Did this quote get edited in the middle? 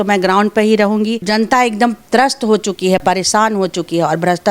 yes; 2 cuts; at 1.2 s, 3.0 s

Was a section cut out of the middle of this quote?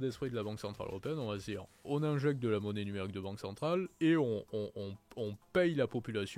yes; 1 cut; at 3.9 s

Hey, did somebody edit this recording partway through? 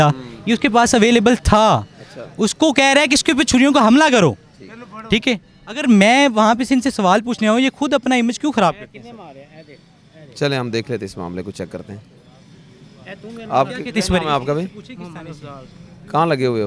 no; 0 cuts

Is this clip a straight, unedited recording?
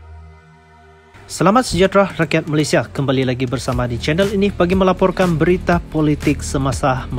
no; 1 cut; at 1.3 s

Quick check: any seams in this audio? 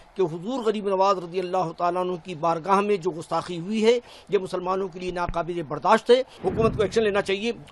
yes; 1 cut; at 6.3 s

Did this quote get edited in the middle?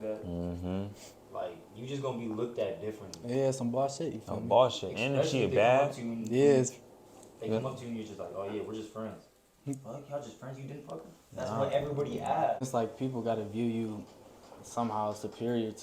yes; 1 cut; at 12.6 s

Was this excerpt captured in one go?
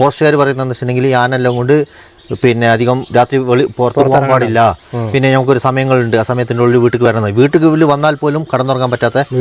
yes; 0 cuts

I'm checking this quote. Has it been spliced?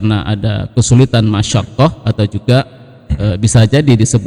no; 0 cuts

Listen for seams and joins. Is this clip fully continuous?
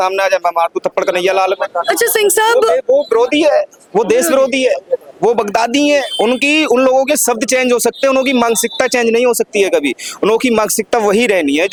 yes; 0 cuts

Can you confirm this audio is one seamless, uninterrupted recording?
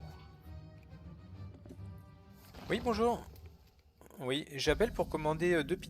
no; 1 cut; at 2.5 s

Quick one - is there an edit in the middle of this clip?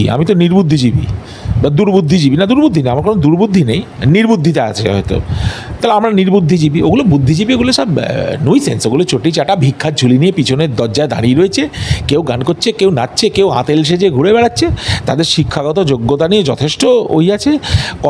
no; 0 cuts

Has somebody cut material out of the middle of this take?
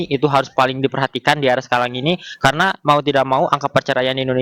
no; 0 cuts

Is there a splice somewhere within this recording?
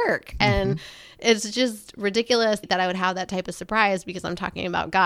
no; 0 cuts

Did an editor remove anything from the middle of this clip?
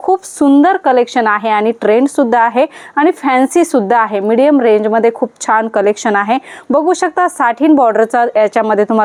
no; 0 cuts

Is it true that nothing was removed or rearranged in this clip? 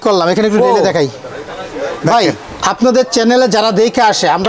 yes; 0 cuts

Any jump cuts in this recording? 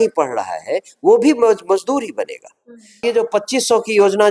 yes; 1 cut; at 3.0 s

